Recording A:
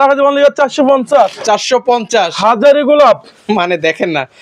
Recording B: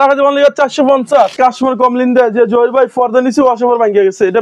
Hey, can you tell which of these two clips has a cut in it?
B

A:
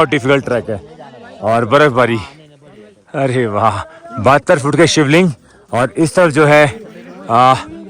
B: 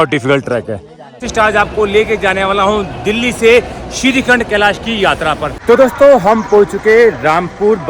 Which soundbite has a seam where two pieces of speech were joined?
B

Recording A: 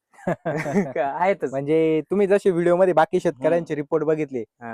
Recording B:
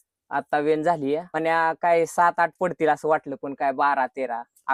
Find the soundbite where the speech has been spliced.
B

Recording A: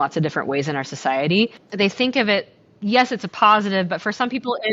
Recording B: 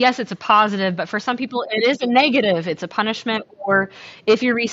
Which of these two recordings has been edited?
A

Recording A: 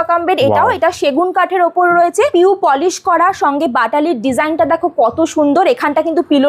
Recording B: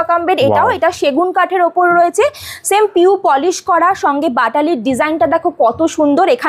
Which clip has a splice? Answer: A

